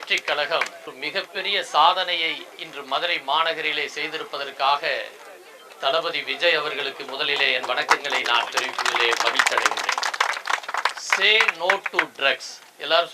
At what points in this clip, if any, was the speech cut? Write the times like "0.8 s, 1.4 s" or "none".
0.9 s, 11.0 s